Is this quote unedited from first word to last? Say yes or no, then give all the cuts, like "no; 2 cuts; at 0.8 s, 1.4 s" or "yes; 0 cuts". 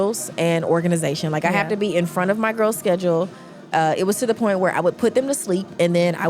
yes; 0 cuts